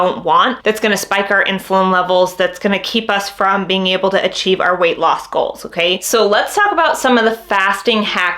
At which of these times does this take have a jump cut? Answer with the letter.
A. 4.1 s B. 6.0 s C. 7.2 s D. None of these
B